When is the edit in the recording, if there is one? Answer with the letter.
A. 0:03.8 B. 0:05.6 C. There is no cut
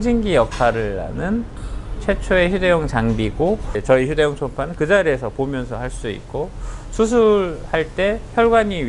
A